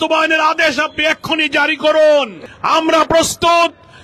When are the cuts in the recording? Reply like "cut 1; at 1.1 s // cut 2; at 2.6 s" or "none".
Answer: cut 1; at 2.4 s